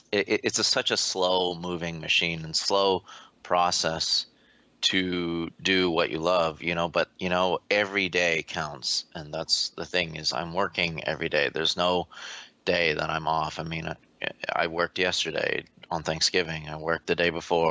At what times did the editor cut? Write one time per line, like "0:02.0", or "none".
none